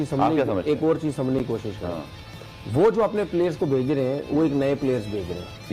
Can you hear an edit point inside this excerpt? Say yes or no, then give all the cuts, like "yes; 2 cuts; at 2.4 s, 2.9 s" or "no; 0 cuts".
no; 0 cuts